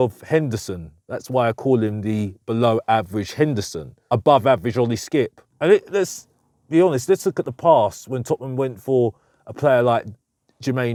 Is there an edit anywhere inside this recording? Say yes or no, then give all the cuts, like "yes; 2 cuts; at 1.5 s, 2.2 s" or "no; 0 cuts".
no; 0 cuts